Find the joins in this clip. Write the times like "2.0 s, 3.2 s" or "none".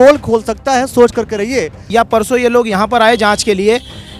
1.8 s